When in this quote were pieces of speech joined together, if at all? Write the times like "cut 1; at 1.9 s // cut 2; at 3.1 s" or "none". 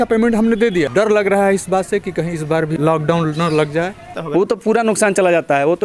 cut 1; at 0.9 s // cut 2; at 2.7 s // cut 3; at 4.2 s